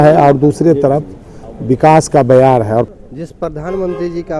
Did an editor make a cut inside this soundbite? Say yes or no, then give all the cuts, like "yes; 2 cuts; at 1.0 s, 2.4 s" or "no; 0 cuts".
yes; 1 cut; at 2.9 s